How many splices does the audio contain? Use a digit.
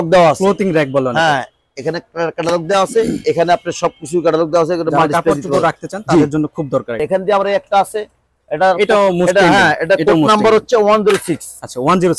1